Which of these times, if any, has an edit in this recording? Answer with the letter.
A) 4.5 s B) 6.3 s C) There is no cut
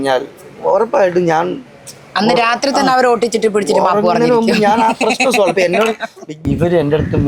B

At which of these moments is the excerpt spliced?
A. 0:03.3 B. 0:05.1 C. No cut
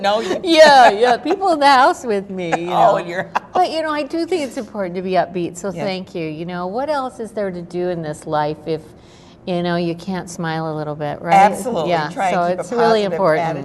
B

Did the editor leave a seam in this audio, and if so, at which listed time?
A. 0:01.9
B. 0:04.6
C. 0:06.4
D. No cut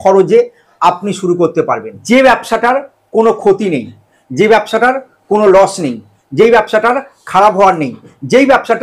A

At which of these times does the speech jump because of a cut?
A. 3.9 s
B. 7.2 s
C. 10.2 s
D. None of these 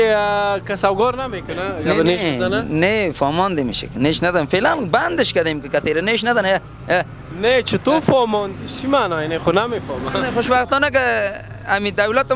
C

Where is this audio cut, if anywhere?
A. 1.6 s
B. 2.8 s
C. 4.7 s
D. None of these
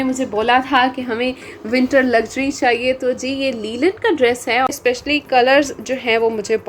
C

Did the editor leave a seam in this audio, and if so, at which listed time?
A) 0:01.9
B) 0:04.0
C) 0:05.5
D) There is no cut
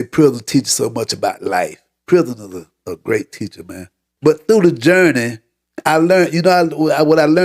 B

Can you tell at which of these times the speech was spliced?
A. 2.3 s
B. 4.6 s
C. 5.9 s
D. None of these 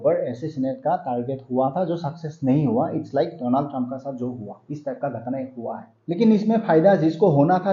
C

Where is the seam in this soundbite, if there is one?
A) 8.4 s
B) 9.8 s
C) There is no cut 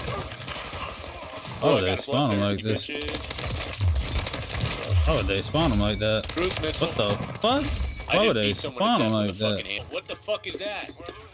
B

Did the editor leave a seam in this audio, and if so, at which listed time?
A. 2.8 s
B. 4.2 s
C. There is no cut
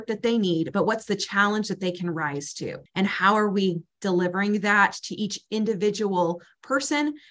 A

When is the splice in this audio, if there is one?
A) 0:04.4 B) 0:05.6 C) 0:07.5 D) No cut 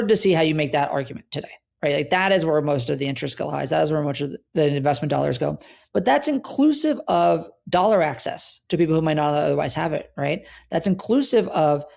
A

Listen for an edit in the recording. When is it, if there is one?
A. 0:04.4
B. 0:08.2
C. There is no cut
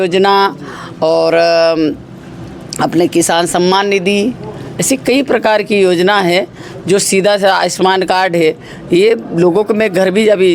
C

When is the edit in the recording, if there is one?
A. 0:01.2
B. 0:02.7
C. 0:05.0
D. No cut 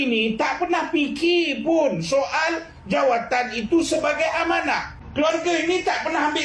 C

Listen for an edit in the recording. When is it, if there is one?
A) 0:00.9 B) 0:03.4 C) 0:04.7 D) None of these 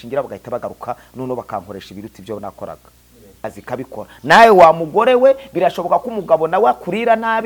B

